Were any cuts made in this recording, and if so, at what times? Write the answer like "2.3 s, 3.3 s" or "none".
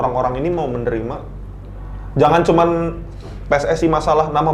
none